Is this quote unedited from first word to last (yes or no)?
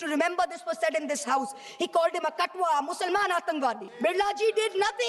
no